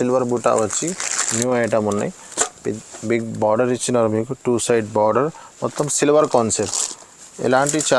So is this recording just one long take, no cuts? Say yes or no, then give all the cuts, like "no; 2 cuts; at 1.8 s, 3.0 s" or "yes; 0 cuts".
yes; 0 cuts